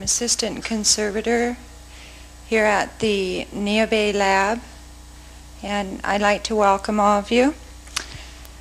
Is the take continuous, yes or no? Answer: yes